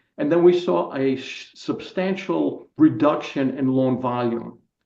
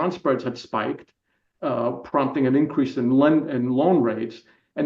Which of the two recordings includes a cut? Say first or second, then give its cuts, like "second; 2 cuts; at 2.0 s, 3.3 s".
first; 1 cut; at 2.7 s